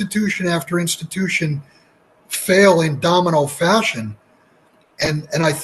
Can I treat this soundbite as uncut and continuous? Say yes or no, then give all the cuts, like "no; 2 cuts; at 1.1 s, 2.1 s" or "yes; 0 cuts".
yes; 0 cuts